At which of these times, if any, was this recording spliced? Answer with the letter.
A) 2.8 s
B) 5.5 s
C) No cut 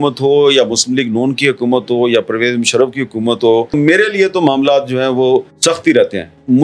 B